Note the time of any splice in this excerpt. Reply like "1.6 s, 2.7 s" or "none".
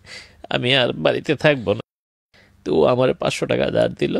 1.9 s